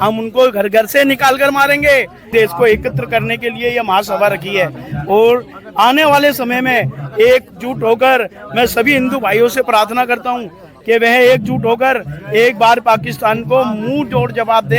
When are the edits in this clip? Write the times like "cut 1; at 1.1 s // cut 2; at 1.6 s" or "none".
cut 1; at 2.3 s